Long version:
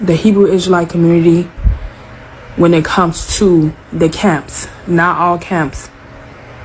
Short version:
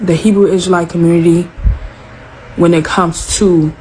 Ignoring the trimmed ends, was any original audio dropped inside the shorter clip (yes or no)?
no